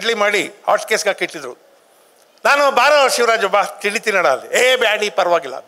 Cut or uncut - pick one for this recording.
uncut